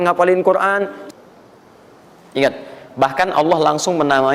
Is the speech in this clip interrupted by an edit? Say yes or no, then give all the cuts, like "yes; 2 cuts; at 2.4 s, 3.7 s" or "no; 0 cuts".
yes; 1 cut; at 1.0 s